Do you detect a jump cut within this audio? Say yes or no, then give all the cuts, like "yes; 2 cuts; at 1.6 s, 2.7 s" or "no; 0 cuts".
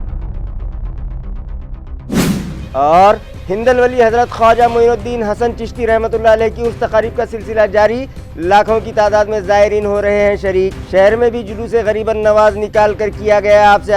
no; 0 cuts